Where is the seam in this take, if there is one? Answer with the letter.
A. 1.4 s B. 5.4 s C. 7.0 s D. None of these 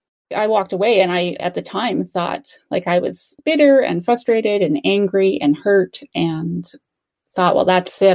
A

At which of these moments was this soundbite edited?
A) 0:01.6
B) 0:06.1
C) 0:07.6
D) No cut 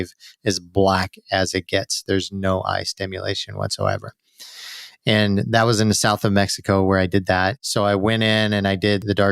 C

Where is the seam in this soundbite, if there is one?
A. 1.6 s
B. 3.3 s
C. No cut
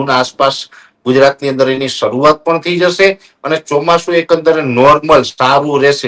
C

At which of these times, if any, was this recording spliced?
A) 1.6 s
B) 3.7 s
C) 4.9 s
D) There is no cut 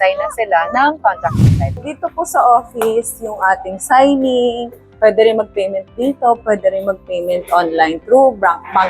A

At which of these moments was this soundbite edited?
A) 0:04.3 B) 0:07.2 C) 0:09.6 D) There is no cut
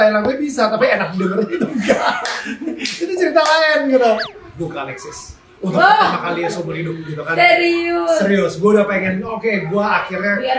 A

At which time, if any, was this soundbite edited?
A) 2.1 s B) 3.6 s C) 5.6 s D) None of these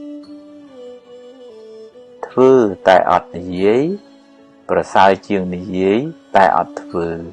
A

